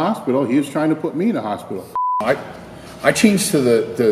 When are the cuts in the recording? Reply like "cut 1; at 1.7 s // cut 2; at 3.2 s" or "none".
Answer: cut 1; at 2.2 s